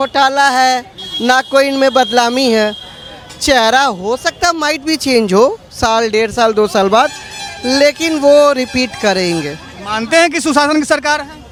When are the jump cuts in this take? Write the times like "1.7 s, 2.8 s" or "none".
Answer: none